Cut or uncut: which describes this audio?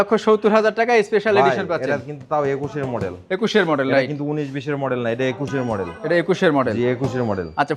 uncut